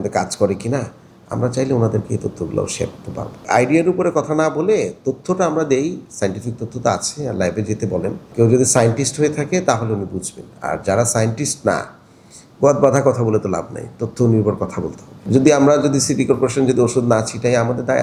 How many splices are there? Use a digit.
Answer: 3